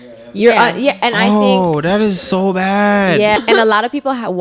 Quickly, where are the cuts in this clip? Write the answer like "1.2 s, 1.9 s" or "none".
3.4 s